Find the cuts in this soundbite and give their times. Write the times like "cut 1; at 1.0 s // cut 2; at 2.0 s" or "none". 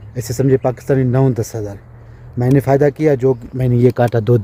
none